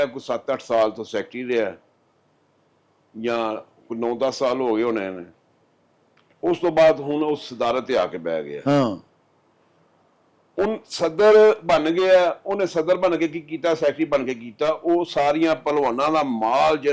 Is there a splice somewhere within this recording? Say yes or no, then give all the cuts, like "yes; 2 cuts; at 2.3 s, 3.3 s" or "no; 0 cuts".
no; 0 cuts